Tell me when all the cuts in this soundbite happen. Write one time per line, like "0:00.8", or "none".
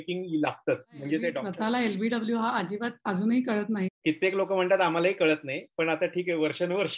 0:01.4
0:03.9